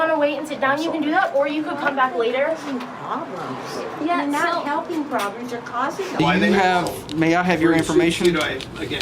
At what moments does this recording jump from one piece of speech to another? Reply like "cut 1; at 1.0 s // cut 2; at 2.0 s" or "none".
cut 1; at 6.2 s